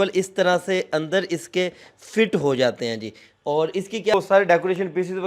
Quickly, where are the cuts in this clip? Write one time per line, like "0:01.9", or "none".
0:04.1